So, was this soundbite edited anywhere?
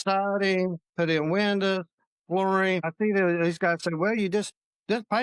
yes; 1 cut; at 2.9 s

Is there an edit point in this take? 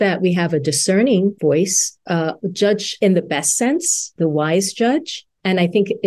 yes; 3 cuts; at 1.4 s, 2.9 s, 4.1 s

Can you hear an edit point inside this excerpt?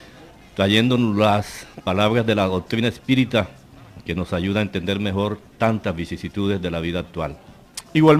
no; 0 cuts

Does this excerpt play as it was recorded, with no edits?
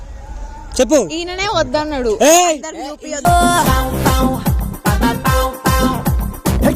yes; 0 cuts

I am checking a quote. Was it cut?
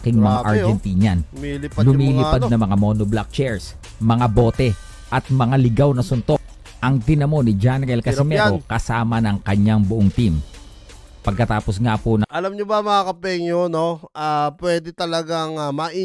no; 0 cuts

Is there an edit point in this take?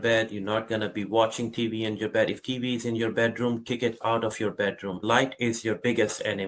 yes; 1 cut; at 5.0 s

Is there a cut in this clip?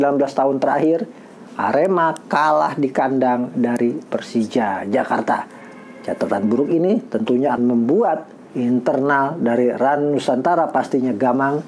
yes; 1 cut; at 7.6 s

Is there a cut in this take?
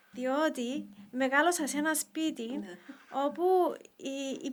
no; 0 cuts

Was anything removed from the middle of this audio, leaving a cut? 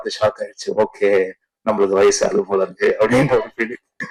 no; 0 cuts

